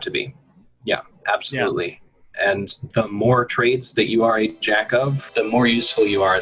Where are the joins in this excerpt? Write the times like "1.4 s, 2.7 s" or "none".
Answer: 5.2 s